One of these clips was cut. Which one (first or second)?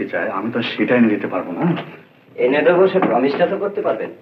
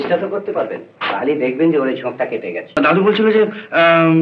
second